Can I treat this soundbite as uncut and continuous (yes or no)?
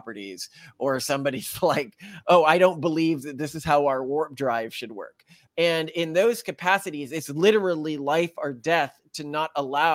yes